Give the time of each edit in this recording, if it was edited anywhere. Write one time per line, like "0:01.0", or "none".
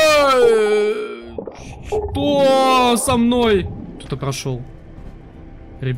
0:03.8